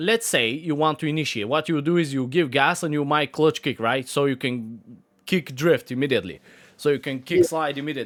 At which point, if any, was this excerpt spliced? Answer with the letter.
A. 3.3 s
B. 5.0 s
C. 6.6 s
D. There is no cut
D